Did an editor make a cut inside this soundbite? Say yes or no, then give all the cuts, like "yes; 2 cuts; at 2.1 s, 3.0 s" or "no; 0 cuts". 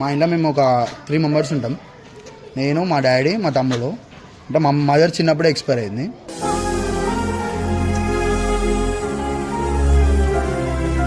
no; 0 cuts